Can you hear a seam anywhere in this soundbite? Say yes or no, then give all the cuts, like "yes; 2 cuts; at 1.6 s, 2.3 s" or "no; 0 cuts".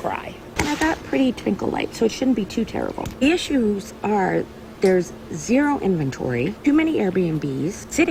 no; 0 cuts